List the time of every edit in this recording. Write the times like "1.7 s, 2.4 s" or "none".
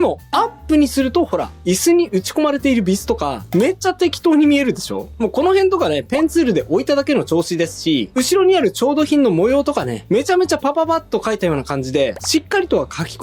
none

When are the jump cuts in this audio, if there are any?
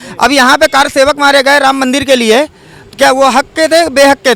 none

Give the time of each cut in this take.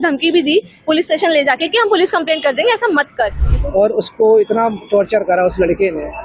3.4 s

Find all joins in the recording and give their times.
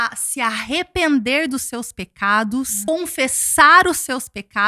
2.8 s

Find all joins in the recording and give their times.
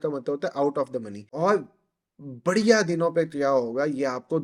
1.2 s

